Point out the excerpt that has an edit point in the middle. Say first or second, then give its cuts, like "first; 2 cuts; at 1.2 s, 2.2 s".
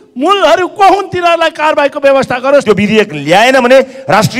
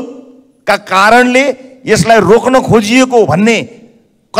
first; 1 cut; at 2.6 s